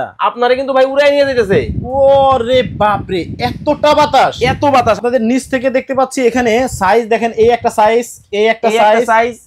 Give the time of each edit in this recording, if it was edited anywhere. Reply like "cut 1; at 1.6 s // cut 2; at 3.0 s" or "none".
cut 1; at 5.0 s